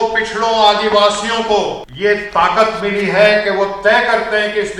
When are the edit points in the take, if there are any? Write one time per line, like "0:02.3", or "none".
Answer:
0:01.8